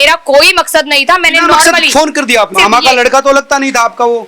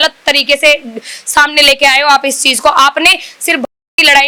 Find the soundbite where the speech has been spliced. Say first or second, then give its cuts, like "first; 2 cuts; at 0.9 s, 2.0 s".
first; 1 cut; at 2.5 s